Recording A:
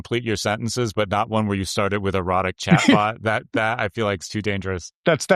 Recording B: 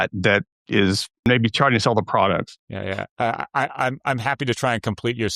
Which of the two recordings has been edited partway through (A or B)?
B